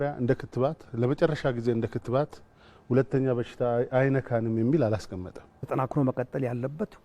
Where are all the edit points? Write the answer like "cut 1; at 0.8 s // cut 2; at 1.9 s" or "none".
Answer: cut 1; at 5.6 s